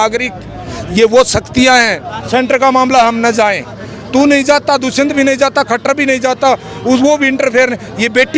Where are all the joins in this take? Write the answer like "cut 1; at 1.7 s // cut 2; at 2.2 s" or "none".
cut 1; at 2.1 s